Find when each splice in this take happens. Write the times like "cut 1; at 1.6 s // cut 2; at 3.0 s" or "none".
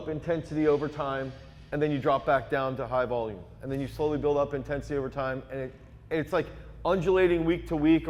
none